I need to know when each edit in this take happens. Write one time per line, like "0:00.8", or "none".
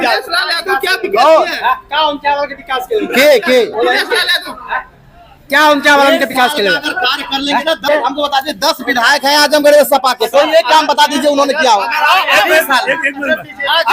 0:07.9